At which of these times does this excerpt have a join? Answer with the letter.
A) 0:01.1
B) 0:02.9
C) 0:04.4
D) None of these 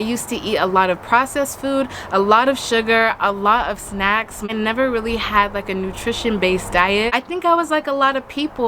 D